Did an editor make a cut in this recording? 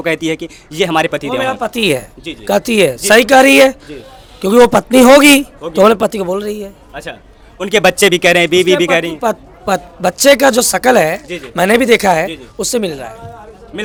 no; 0 cuts

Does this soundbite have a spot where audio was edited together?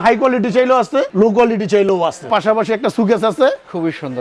yes; 2 cuts; at 1.1 s, 2.3 s

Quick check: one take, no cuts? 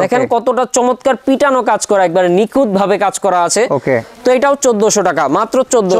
yes; 0 cuts

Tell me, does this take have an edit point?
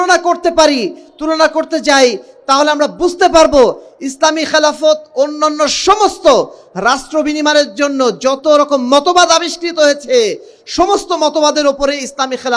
no; 0 cuts

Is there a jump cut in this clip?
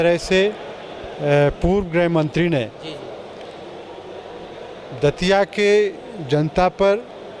no; 0 cuts

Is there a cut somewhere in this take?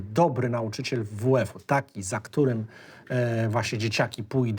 no; 0 cuts

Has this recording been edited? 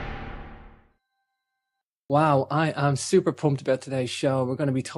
no; 0 cuts

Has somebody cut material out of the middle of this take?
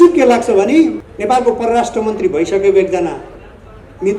yes; 1 cut; at 1.1 s

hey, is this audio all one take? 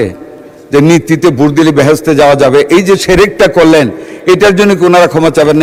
yes; 0 cuts

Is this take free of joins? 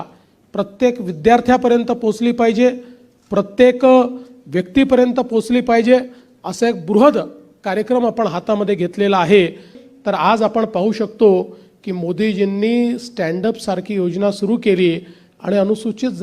no; 1 cut; at 9.8 s

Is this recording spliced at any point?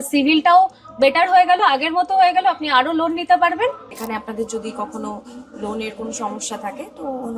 yes; 1 cut; at 3.9 s

